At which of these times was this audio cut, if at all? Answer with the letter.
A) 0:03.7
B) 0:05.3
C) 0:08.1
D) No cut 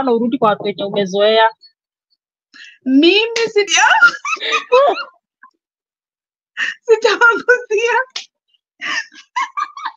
A